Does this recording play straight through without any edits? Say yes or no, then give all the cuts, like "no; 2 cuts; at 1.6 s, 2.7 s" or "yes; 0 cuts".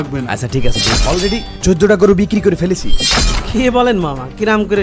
no; 1 cut; at 1.0 s